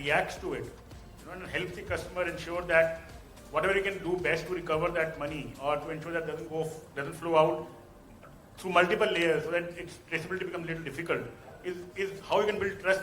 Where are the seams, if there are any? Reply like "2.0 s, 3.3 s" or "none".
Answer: none

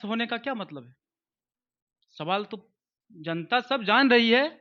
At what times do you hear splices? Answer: none

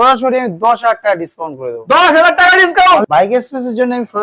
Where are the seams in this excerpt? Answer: 3.1 s

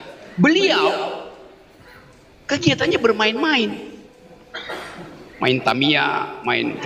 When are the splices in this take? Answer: none

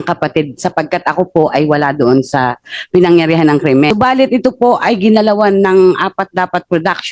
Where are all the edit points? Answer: 3.9 s

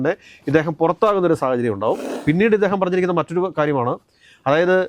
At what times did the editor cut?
2.1 s

